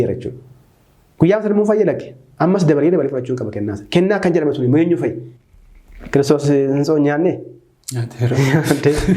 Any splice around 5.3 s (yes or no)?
yes